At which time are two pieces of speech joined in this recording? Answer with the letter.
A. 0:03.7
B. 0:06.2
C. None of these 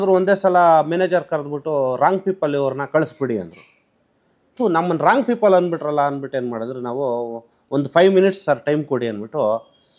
C